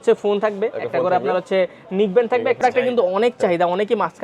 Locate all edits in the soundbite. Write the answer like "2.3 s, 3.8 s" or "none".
2.6 s